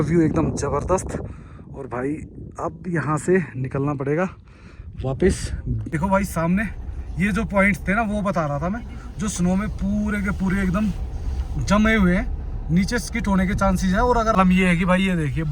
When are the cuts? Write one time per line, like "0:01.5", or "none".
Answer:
0:05.8
0:14.3